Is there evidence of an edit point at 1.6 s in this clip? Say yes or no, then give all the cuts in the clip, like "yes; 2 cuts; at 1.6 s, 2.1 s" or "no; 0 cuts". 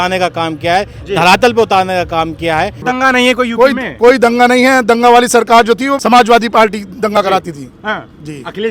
no; 2 cuts; at 2.8 s, 5.9 s